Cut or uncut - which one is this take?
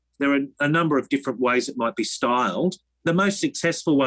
cut